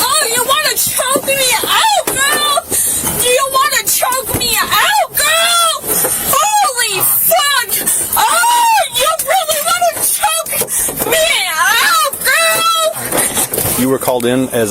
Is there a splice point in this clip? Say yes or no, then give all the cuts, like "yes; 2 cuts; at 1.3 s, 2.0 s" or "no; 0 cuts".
yes; 1 cut; at 13.7 s